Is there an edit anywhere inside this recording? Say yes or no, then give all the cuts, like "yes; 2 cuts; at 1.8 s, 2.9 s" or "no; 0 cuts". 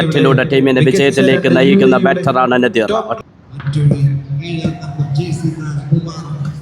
yes; 1 cut; at 3.0 s